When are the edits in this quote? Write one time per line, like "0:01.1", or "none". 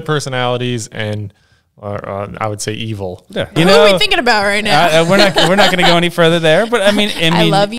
0:03.5

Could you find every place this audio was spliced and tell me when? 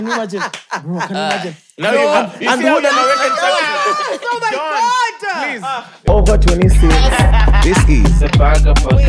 0:06.0

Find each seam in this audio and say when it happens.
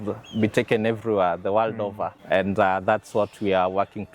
0:02.2

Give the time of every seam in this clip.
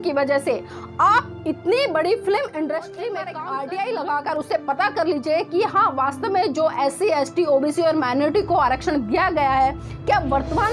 0:03.3

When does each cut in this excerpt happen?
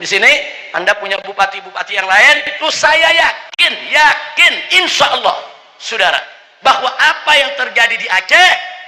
0:02.5

